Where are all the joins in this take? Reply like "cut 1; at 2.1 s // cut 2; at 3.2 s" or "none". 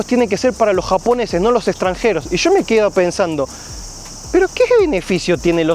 none